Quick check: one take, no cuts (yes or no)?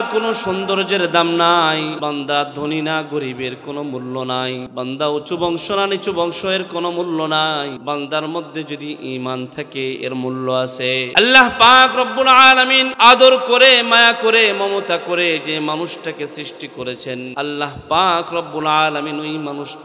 no